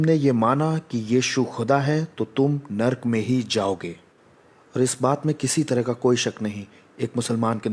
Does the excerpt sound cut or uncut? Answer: uncut